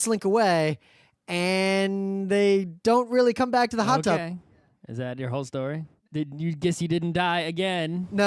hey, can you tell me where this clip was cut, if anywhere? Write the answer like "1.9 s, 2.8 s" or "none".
3.3 s